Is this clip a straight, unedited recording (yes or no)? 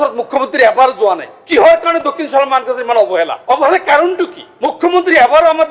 no